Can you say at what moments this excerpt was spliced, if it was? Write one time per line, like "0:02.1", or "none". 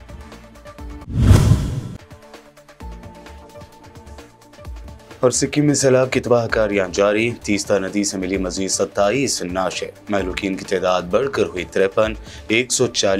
none